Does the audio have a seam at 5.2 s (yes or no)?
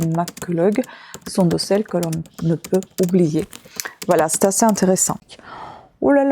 yes